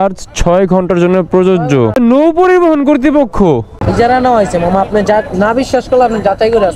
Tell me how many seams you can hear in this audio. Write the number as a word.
two